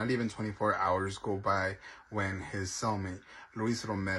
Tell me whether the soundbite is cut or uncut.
uncut